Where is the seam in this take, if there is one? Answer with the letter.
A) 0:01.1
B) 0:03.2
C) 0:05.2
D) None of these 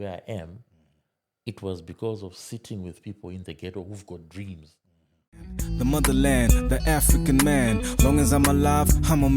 C